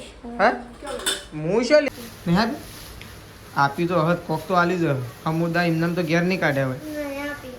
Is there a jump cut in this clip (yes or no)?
yes